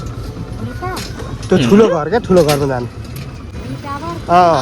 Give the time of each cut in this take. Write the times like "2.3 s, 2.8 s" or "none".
3.6 s